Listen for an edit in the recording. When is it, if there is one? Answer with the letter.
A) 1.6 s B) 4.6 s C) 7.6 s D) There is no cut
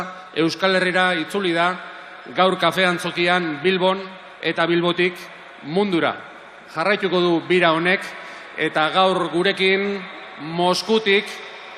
D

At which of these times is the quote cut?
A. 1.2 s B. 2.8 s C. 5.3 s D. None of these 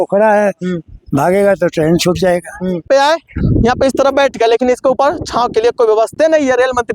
B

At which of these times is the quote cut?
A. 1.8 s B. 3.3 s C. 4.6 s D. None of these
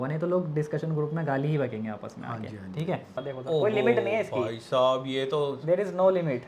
B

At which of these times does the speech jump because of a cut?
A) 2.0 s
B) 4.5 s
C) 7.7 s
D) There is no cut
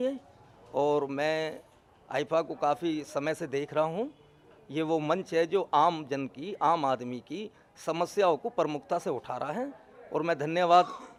D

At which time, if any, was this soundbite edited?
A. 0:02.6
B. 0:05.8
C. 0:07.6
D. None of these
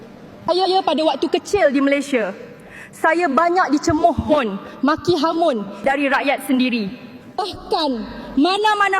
B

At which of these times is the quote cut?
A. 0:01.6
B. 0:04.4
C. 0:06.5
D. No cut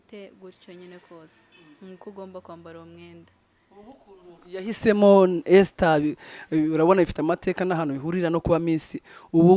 D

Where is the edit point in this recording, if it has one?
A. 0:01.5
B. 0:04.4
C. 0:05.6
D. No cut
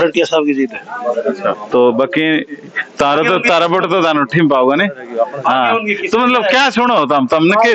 A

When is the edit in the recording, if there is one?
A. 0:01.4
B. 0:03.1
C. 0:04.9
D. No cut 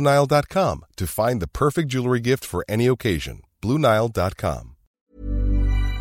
C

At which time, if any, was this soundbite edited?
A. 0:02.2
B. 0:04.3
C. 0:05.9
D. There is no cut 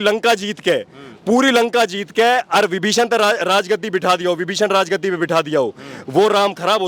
D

